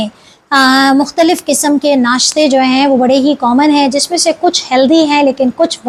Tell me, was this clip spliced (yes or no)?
no